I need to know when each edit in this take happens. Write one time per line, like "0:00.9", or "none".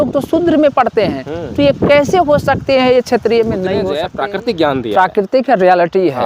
0:04.0